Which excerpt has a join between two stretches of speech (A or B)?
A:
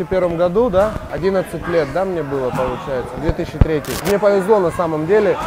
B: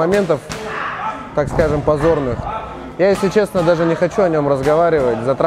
A